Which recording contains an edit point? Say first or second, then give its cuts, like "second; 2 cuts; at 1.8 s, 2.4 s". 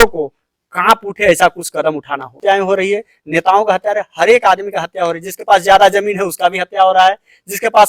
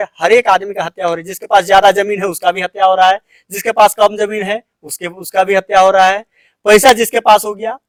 first; 1 cut; at 2.3 s